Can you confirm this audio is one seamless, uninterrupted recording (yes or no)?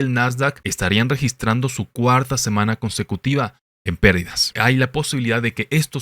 no